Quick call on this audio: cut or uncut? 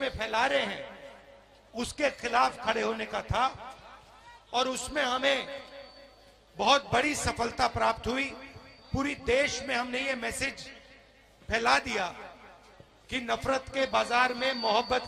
uncut